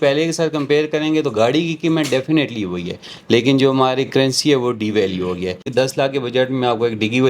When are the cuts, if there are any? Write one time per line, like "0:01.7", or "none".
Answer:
0:05.7